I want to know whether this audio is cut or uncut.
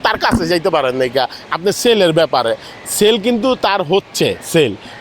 uncut